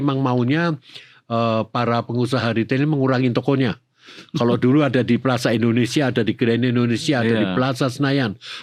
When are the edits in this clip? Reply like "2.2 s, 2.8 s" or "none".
none